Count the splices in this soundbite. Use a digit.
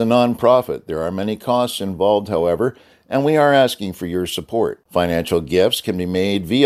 0